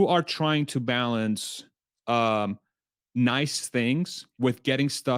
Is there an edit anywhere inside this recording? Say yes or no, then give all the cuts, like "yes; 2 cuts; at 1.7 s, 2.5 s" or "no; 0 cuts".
no; 0 cuts